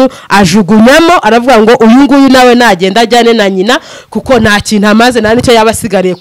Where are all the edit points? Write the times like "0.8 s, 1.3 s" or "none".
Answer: none